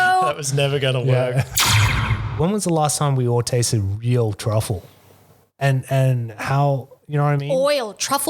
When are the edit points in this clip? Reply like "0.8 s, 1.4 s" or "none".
1.7 s